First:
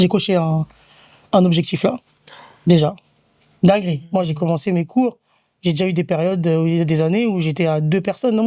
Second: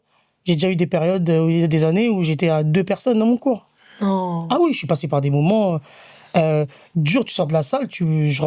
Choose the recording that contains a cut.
first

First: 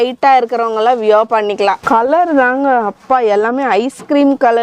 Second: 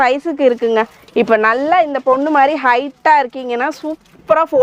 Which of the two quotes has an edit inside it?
first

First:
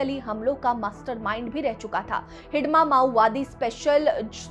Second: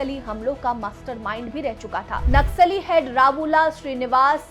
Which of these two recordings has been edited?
second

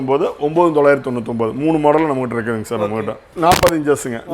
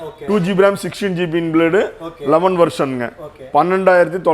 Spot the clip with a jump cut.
first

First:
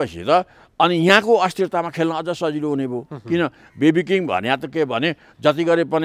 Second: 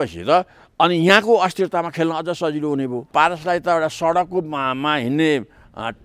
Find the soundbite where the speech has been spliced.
second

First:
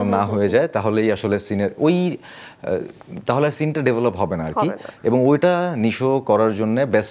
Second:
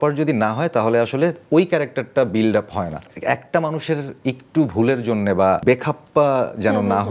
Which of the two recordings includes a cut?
second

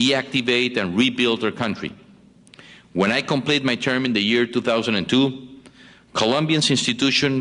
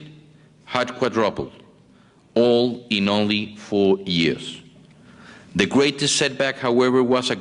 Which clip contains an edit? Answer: second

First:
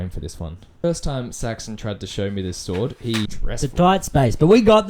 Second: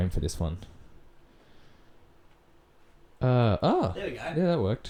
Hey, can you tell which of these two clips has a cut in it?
first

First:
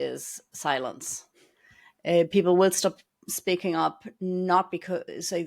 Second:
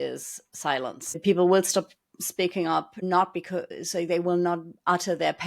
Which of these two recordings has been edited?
second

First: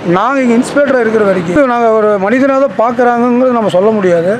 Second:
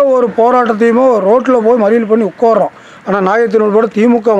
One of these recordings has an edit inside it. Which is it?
first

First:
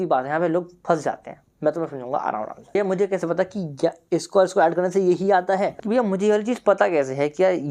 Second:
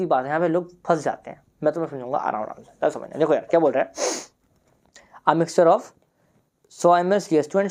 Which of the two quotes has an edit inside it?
first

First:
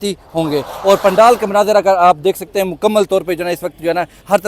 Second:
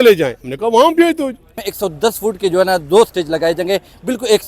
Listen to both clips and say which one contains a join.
second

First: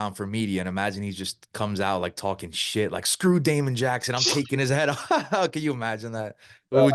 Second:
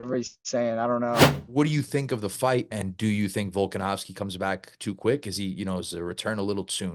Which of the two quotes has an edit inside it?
second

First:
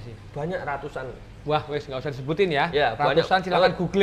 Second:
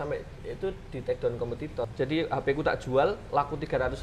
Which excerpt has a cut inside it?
second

